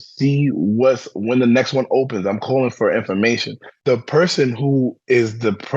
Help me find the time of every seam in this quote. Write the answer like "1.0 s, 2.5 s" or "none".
3.7 s